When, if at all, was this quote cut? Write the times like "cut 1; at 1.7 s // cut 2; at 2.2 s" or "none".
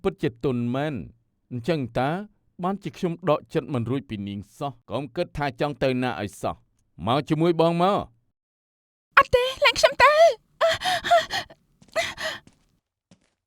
cut 1; at 4.8 s